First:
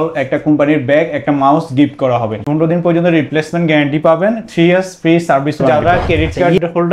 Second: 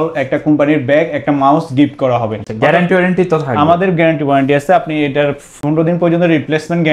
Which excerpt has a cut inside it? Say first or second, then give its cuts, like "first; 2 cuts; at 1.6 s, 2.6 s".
first; 2 cuts; at 2.4 s, 5.7 s